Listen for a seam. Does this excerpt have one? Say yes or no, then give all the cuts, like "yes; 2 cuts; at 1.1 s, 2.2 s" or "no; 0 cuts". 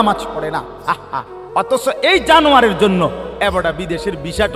no; 0 cuts